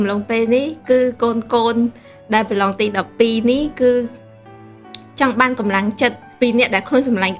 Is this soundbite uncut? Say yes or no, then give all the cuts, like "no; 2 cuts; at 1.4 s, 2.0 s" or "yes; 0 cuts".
no; 1 cut; at 6.2 s